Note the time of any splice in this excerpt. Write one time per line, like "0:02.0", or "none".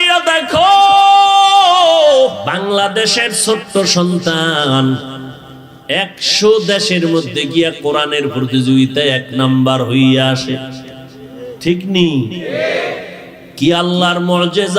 0:02.4